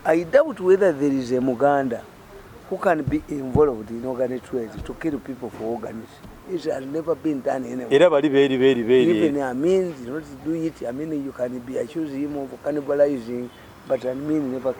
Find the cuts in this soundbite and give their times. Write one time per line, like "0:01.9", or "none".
none